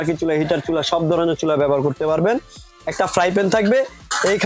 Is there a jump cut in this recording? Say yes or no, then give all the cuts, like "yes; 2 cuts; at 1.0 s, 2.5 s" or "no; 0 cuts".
no; 0 cuts